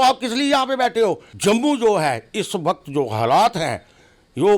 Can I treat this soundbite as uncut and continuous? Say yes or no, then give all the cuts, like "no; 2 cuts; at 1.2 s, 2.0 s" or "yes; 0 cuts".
no; 1 cut; at 1.3 s